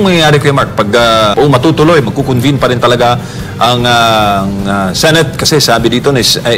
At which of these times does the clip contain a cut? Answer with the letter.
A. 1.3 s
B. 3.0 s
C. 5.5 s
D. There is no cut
A